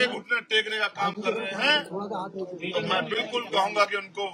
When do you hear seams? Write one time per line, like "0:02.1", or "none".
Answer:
none